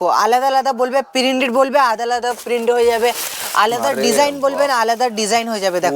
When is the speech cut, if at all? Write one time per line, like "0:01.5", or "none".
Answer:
none